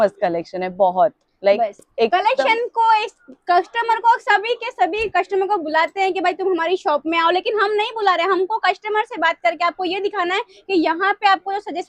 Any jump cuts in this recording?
no; 0 cuts

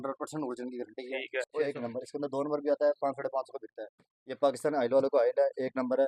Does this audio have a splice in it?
yes; 1 cut; at 1.4 s

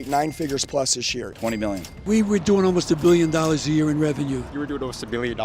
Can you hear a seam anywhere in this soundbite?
yes; 2 cuts; at 1.4 s, 4.5 s

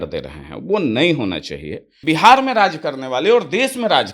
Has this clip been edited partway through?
yes; 1 cut; at 2.0 s

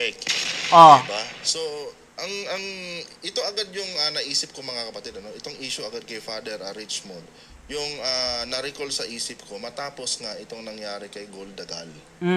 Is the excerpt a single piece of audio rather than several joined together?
yes; 0 cuts

